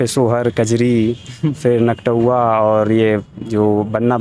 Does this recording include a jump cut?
no; 0 cuts

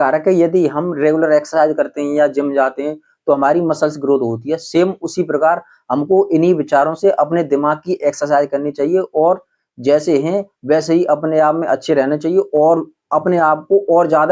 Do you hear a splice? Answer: no; 0 cuts

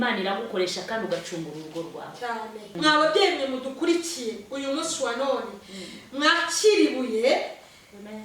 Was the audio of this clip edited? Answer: yes; 1 cut; at 2.7 s

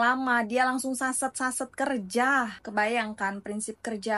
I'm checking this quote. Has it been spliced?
no; 0 cuts

